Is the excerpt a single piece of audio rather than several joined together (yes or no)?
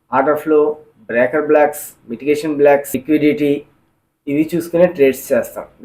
no